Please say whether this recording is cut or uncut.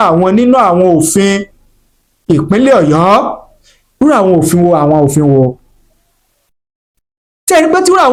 uncut